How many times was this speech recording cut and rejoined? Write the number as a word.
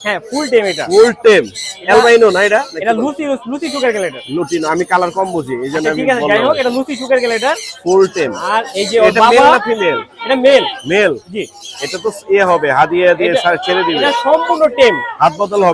zero